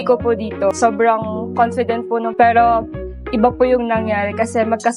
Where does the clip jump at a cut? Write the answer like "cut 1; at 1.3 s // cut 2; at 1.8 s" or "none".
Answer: cut 1; at 2.3 s

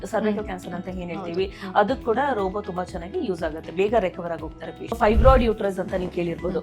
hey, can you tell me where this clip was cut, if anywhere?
cut 1; at 5.0 s

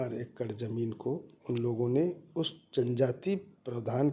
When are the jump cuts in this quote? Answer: cut 1; at 1.3 s

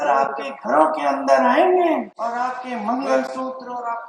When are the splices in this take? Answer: cut 1; at 2.1 s

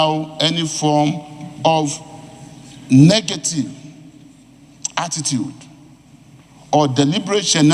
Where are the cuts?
none

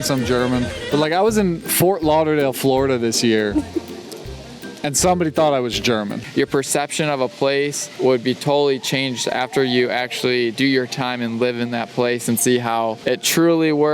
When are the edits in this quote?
cut 1; at 0.8 s // cut 2; at 6.1 s // cut 3; at 7.8 s // cut 4; at 13.0 s

